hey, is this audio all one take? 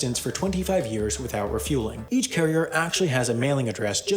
no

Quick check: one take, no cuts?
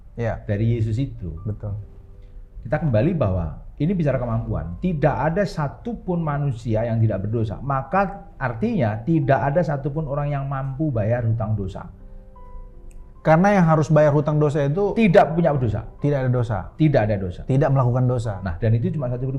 yes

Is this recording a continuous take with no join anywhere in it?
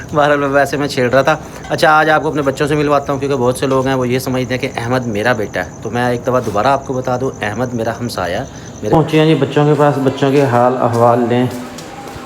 no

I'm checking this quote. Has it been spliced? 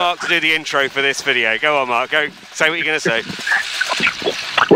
no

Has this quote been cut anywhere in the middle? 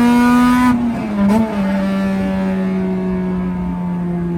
no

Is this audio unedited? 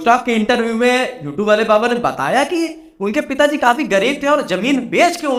yes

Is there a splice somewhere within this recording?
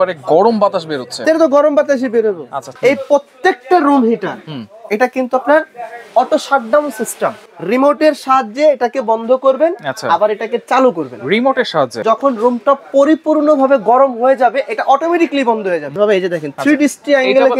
yes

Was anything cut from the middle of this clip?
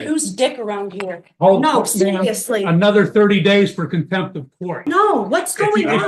yes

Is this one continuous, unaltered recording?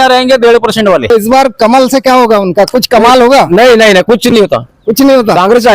no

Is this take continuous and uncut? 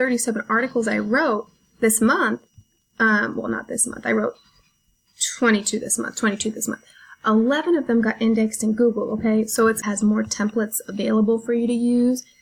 no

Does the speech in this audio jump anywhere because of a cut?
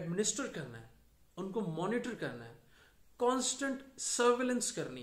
no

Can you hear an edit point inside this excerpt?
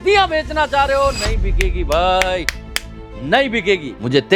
no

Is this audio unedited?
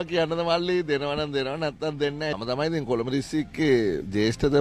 yes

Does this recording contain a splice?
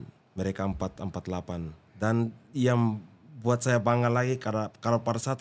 no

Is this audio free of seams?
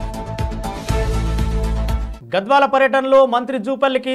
yes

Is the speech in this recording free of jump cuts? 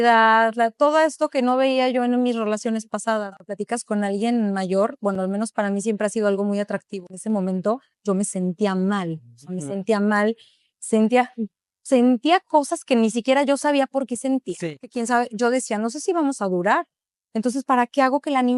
no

